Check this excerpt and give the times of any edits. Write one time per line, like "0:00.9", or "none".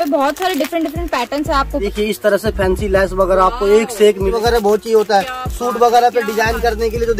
0:01.8
0:04.3